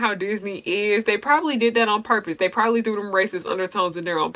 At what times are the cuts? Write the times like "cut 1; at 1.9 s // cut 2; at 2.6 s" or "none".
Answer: none